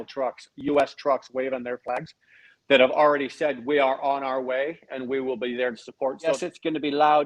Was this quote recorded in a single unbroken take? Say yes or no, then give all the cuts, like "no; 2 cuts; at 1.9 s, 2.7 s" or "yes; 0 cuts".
no; 1 cut; at 6.3 s